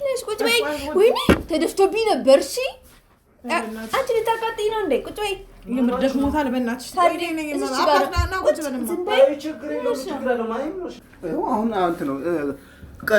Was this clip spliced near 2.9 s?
no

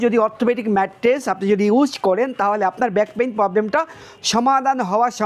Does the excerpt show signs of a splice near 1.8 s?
no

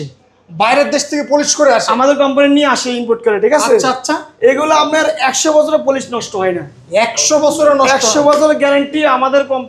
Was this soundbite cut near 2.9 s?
no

